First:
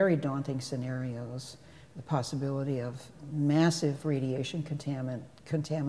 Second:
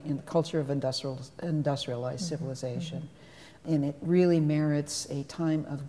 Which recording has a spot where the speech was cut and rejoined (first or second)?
second